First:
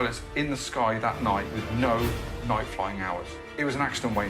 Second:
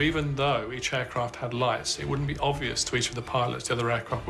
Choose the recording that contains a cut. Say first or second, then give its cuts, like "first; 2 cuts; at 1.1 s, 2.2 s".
first; 2 cuts; at 1.6 s, 3.4 s